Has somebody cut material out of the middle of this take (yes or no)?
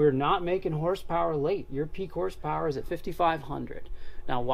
no